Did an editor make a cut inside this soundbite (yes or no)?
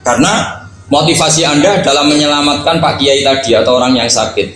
no